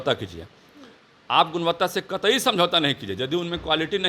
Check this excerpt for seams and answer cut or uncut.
uncut